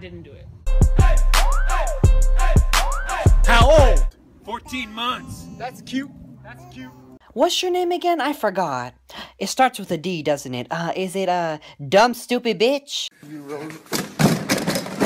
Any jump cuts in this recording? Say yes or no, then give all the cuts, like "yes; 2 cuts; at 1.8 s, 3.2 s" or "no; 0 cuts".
no; 0 cuts